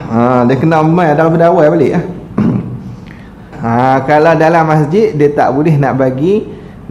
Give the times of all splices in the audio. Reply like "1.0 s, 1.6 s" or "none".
3.5 s